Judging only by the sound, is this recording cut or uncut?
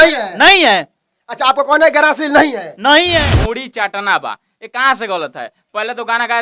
cut